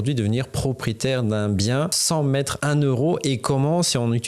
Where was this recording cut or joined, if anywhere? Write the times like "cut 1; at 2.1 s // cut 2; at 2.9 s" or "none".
cut 1; at 2.3 s